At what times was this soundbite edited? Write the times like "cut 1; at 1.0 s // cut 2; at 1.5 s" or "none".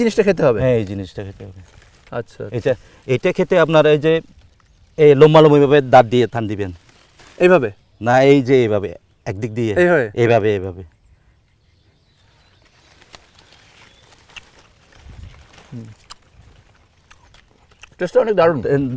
none